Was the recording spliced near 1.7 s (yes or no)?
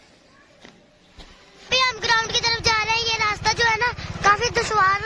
yes